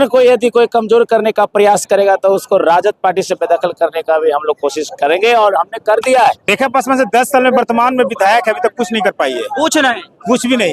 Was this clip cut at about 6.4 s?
yes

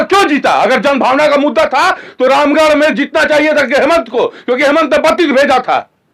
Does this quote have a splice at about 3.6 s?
no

